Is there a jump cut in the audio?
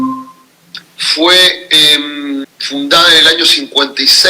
yes; 1 cut; at 2.5 s

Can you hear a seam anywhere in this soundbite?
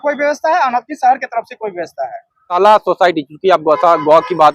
yes; 1 cut; at 2.5 s

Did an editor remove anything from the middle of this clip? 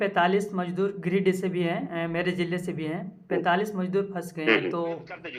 no; 0 cuts

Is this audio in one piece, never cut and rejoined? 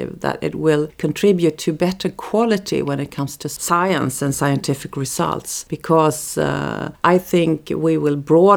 yes; 0 cuts

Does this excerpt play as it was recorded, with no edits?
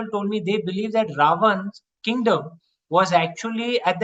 yes; 0 cuts

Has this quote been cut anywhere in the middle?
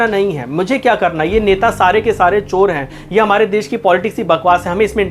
no; 0 cuts

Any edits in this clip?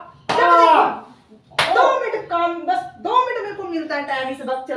no; 0 cuts

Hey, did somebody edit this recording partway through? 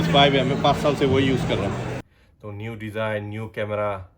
yes; 1 cut; at 1.9 s

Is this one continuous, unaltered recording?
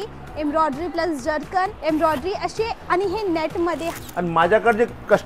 no; 2 cuts; at 1.8 s, 3.9 s

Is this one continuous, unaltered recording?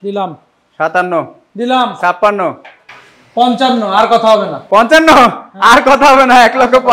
yes; 0 cuts

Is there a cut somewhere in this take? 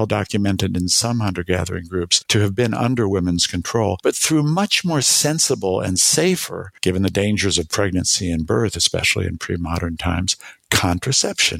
yes; 1 cut; at 2.2 s

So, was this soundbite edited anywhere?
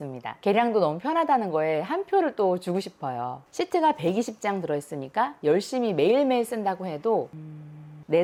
no; 0 cuts

